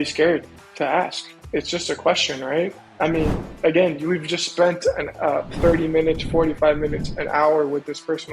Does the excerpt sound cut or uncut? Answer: uncut